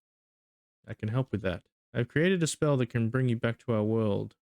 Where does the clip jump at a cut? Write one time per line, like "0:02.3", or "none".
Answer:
0:01.7